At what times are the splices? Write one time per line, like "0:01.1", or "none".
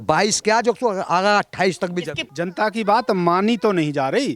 0:02.2